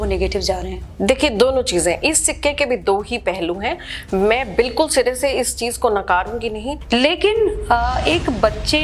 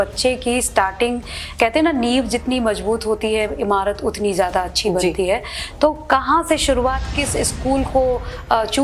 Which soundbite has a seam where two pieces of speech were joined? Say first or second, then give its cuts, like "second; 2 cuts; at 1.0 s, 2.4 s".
first; 1 cut; at 6.7 s